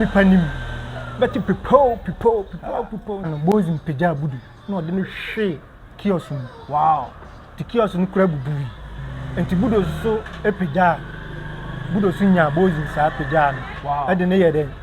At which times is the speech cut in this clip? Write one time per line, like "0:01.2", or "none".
0:03.3